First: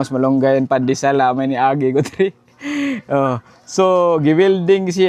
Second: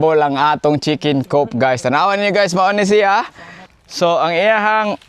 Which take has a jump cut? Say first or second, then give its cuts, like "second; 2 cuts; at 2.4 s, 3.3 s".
second; 1 cut; at 3.6 s